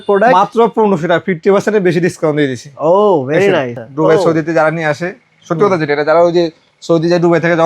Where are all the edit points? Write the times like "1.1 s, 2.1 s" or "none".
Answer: 3.8 s